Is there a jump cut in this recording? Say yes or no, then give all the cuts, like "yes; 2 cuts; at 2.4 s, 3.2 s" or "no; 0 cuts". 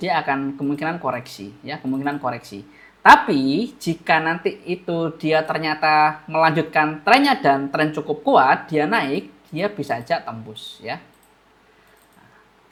no; 0 cuts